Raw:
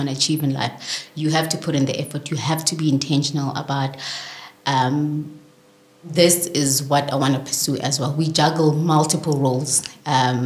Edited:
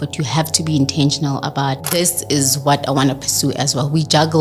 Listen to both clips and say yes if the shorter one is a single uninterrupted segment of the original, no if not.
no